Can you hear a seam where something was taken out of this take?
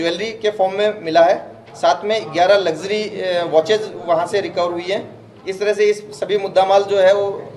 no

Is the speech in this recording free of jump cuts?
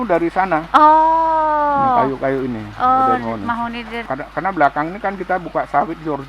no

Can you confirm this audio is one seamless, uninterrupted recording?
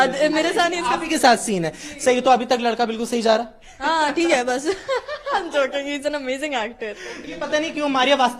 no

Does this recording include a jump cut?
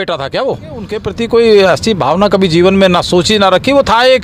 yes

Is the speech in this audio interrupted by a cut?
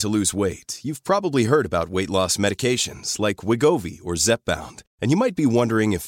no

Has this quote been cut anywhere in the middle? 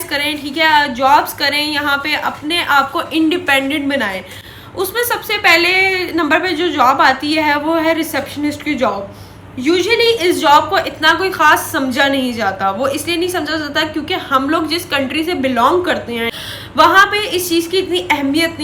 no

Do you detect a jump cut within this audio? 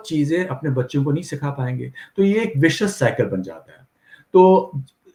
no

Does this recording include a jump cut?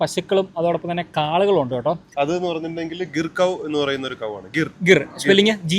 yes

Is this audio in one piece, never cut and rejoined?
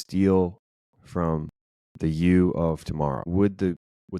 no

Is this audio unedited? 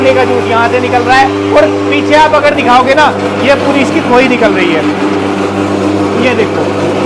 yes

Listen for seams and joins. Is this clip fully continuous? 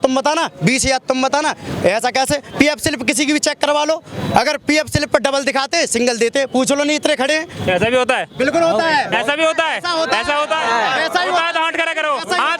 yes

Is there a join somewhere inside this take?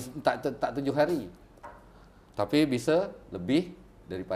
no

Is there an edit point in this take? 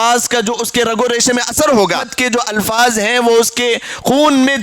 yes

